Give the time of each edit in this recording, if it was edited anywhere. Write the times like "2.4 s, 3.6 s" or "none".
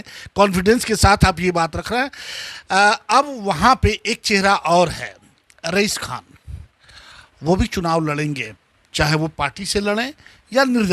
none